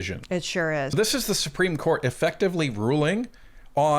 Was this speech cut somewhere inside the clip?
yes; 1 cut; at 0.9 s

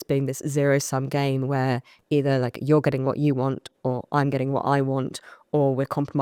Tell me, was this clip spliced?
no; 0 cuts

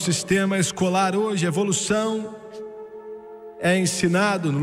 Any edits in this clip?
no; 0 cuts

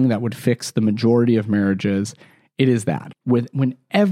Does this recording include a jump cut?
yes; 1 cut; at 3.1 s

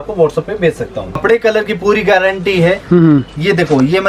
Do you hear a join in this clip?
yes; 1 cut; at 1.2 s

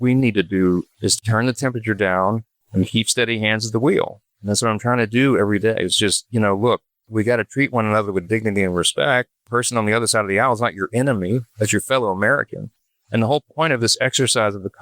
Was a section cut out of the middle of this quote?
yes; 1 cut; at 1.2 s

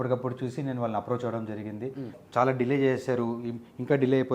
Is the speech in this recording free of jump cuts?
no; 1 cut; at 2.1 s

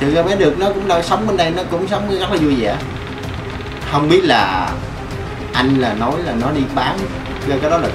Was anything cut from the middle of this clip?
no; 0 cuts

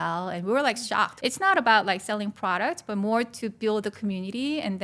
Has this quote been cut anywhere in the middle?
yes; 1 cut; at 1.1 s

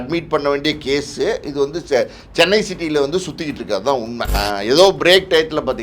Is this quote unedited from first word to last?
no; 1 cut; at 4.3 s

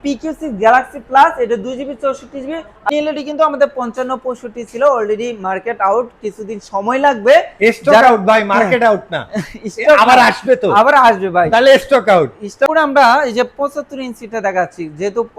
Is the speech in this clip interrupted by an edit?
yes; 2 cuts; at 2.9 s, 12.7 s

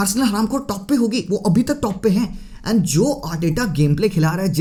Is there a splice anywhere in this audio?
no; 0 cuts

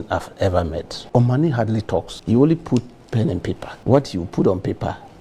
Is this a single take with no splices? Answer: no; 3 cuts; at 0.9 s, 2.1 s, 3.7 s

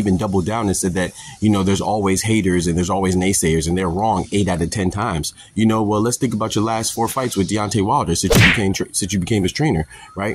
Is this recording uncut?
yes; 0 cuts

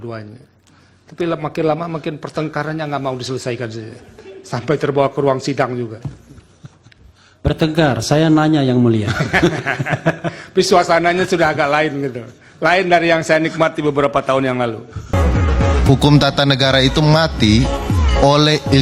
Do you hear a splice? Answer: yes; 1 cut; at 15.1 s

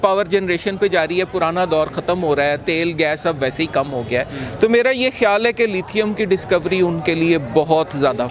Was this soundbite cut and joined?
no; 0 cuts

